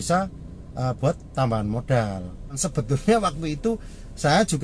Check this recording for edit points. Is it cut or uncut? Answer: cut